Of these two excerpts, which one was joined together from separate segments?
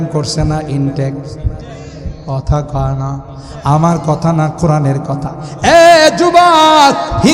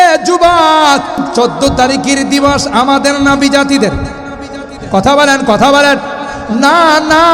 second; 1 cut; at 1.2 s

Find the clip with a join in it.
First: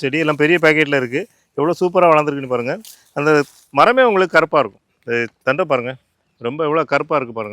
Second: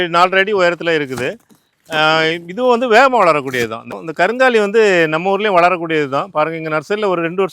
second; 1 cut; at 3.9 s

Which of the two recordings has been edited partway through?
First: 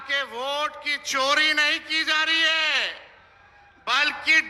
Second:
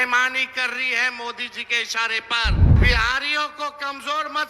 second; 1 cut; at 2.7 s

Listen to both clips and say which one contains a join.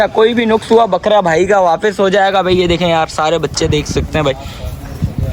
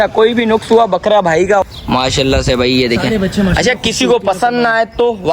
second; 1 cut; at 1.6 s

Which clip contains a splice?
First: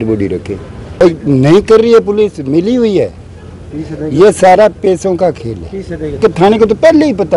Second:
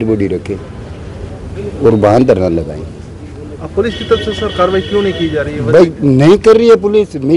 first; 2 cuts; at 1.0 s, 6.2 s

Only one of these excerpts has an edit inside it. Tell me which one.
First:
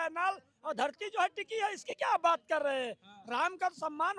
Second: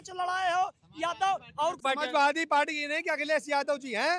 second; 1 cut; at 1.8 s

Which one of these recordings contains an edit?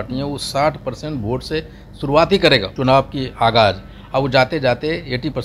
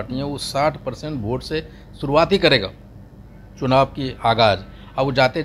first; 1 cut; at 2.7 s

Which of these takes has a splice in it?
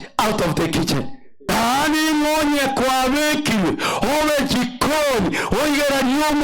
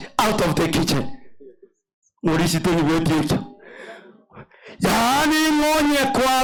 first; 1 cut; at 1.5 s

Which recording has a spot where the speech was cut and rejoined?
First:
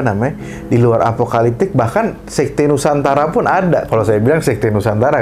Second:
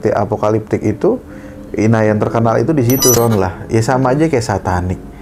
second; 1 cut; at 3.2 s

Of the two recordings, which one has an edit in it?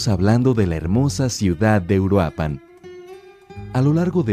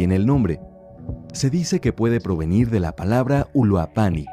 second; 1 cut; at 1.7 s

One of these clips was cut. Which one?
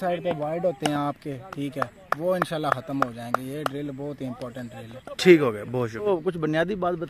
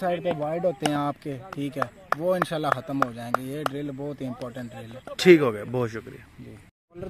first; 1 cut; at 6.1 s

